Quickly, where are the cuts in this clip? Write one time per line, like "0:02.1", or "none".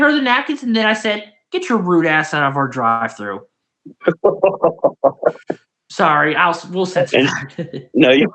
none